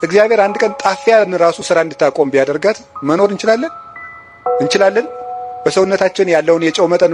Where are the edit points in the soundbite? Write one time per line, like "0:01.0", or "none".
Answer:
none